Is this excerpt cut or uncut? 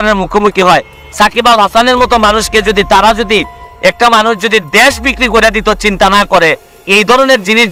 uncut